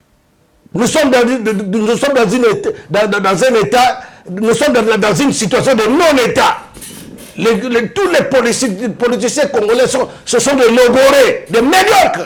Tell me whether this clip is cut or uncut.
uncut